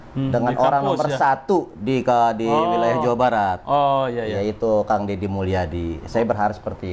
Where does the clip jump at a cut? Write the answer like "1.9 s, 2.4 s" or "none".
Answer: none